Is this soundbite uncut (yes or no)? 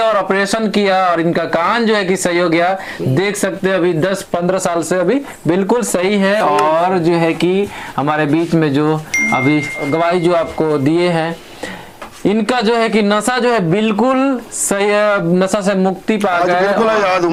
yes